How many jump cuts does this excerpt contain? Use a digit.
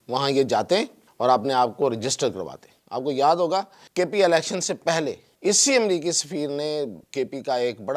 4